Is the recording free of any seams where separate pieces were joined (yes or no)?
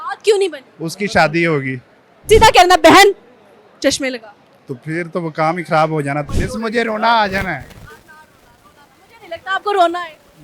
no